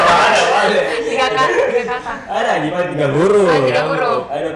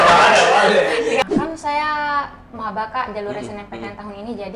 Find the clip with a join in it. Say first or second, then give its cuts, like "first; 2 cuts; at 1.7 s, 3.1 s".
second; 1 cut; at 1.2 s